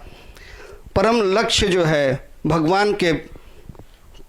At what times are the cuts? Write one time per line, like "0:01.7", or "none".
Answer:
none